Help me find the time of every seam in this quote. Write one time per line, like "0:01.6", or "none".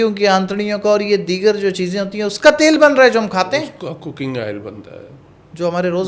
none